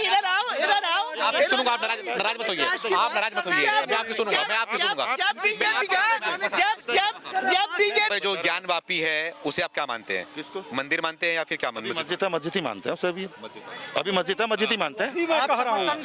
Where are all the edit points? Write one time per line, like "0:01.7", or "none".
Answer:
0:08.1